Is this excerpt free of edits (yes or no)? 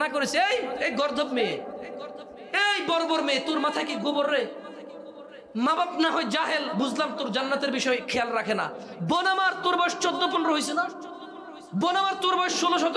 yes